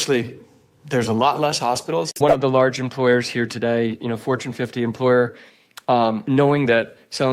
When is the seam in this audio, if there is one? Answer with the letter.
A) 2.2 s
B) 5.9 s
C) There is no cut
A